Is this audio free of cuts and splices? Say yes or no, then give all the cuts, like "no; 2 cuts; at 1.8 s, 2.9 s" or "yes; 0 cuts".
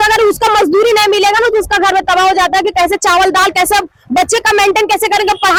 yes; 0 cuts